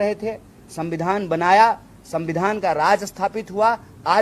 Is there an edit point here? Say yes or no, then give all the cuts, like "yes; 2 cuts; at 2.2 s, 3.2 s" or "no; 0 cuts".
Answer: no; 0 cuts